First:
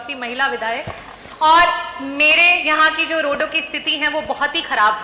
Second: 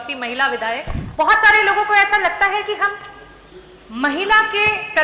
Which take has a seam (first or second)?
second